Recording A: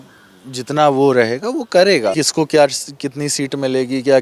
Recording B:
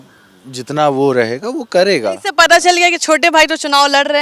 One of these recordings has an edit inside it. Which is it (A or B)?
A